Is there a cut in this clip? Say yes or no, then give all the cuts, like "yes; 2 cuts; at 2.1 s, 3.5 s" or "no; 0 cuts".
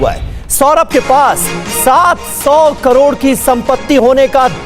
no; 0 cuts